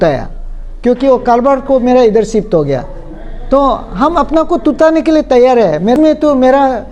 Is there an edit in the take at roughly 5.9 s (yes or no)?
yes